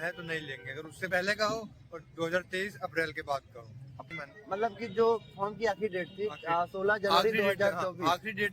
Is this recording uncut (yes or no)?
no